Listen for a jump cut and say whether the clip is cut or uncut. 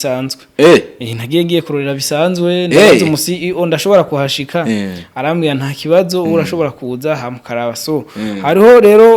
uncut